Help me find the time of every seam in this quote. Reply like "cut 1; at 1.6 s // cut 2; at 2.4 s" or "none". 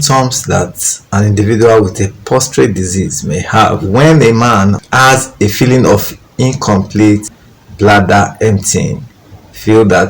cut 1; at 3.8 s